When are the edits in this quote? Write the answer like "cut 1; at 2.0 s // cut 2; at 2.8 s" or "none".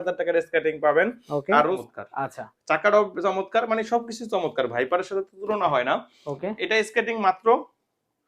cut 1; at 1.8 s

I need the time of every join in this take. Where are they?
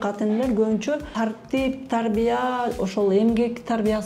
cut 1; at 1.1 s

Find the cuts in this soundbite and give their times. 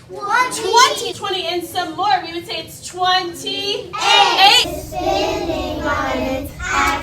cut 1; at 1.1 s // cut 2; at 4.7 s

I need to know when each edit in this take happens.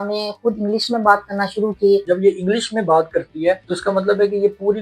cut 1; at 2.0 s // cut 2; at 3.7 s

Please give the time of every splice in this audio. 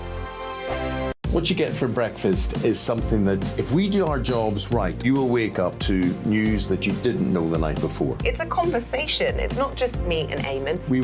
cut 1; at 1.0 s

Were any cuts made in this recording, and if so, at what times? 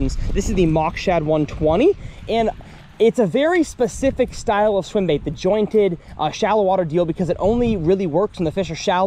none

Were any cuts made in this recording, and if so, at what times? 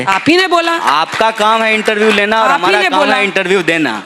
none

